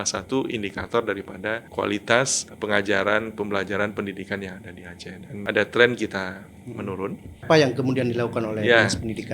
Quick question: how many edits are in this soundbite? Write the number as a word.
four